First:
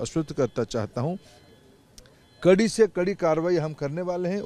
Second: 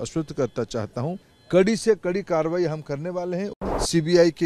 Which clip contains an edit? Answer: second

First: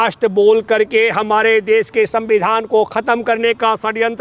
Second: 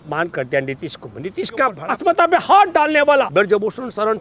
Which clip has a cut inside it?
second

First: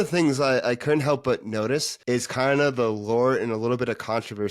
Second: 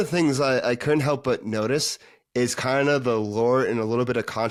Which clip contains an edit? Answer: first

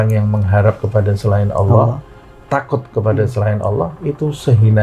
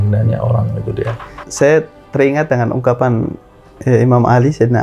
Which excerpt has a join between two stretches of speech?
second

